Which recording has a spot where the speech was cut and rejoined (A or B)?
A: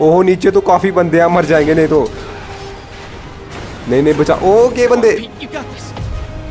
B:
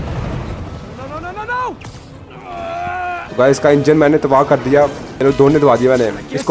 B